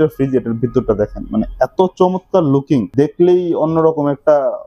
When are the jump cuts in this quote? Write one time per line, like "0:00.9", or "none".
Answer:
0:02.9